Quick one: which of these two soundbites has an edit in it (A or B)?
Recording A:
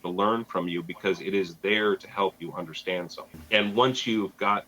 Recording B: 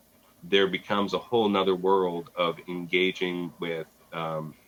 A